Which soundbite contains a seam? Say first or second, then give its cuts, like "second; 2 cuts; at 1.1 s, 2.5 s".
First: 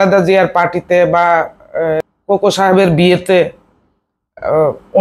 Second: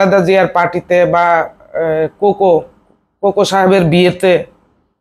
first; 1 cut; at 2.1 s